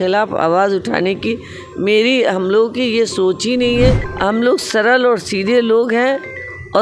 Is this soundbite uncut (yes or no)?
no